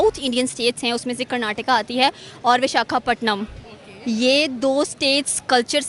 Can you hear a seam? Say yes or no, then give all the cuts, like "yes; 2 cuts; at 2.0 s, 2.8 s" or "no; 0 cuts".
no; 0 cuts